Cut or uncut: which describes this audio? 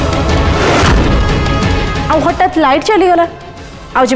cut